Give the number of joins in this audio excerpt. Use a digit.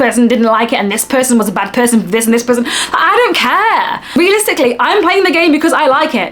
1